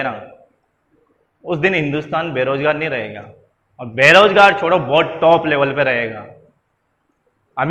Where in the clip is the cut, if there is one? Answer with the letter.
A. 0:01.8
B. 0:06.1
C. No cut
C